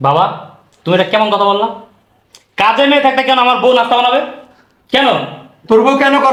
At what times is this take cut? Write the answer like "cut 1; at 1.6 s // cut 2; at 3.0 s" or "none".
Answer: none